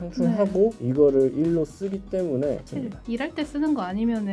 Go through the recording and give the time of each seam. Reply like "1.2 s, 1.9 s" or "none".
2.6 s